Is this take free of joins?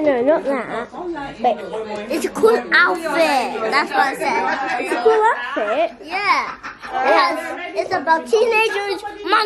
yes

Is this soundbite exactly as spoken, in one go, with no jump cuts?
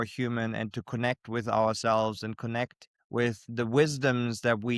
yes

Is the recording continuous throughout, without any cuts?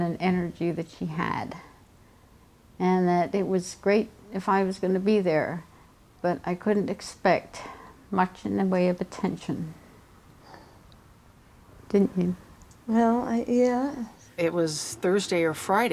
no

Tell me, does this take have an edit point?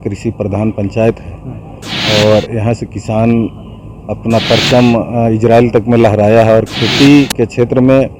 no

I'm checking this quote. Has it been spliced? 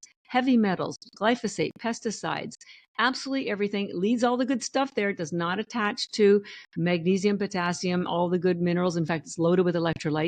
no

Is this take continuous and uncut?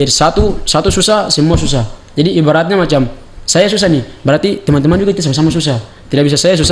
yes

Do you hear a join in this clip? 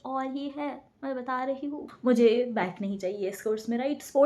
yes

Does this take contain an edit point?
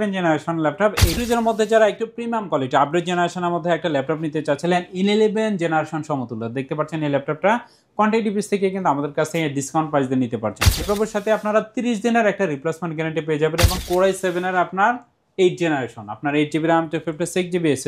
yes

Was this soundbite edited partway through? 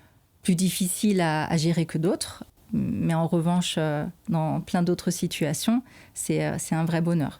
yes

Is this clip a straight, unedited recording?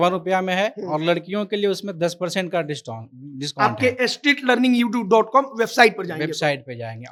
yes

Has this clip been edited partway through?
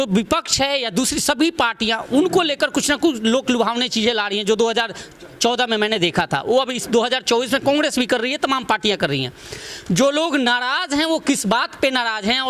no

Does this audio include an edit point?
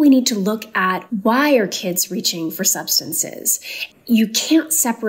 yes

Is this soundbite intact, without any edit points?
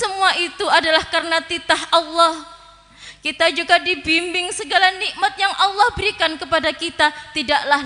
yes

